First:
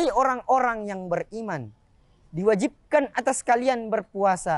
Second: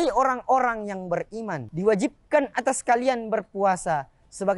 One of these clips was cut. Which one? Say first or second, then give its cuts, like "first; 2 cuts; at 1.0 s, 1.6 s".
second; 1 cut; at 1.6 s